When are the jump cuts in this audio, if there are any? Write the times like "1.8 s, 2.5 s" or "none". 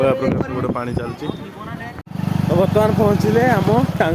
2.1 s